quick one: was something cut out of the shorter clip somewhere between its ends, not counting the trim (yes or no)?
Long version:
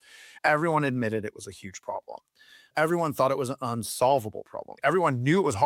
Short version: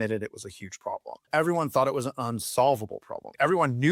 yes